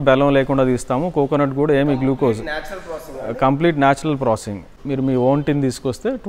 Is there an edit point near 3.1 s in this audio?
no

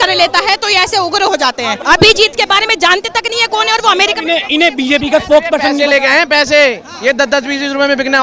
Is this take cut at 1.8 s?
yes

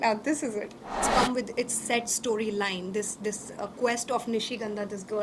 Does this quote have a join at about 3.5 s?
no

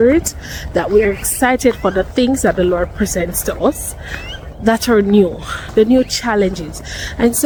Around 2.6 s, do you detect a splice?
no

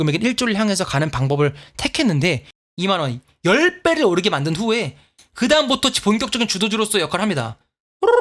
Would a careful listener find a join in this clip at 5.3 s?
no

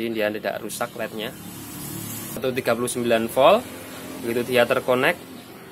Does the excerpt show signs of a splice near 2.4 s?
yes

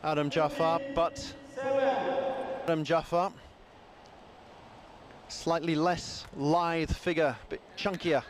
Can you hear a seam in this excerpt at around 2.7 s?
yes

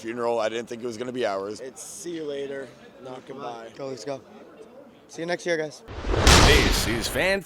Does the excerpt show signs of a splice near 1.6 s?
yes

